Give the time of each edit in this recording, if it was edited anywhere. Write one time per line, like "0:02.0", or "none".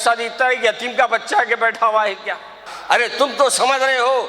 0:02.7